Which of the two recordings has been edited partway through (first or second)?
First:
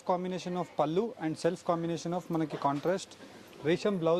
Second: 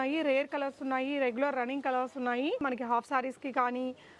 second